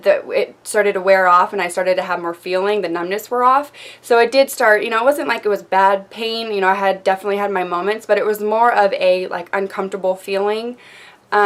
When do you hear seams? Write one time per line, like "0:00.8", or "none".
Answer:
none